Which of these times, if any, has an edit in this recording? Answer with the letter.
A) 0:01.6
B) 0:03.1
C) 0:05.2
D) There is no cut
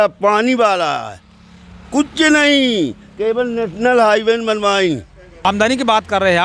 C